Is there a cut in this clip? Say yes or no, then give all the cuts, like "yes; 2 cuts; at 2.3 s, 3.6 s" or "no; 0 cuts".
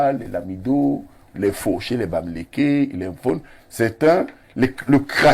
no; 0 cuts